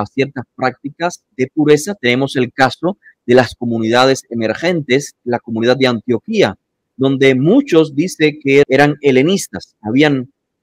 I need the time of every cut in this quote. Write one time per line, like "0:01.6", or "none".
0:01.2
0:05.2
0:08.6